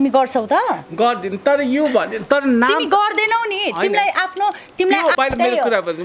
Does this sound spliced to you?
yes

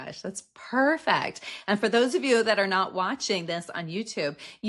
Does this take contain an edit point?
no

